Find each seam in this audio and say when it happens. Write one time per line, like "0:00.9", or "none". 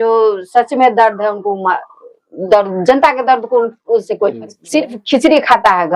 0:04.5